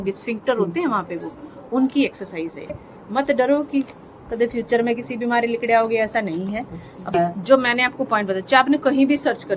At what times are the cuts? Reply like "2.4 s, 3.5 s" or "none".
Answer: 2.7 s, 7.1 s